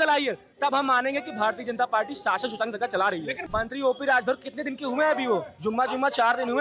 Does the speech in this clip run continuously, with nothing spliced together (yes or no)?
no